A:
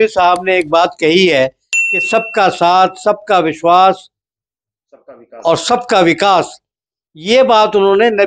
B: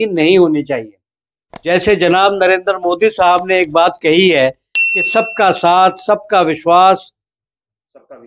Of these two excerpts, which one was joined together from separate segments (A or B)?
B